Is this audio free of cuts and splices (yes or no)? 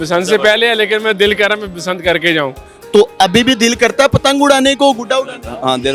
no